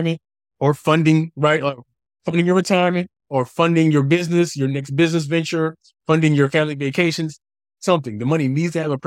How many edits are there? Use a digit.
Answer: 0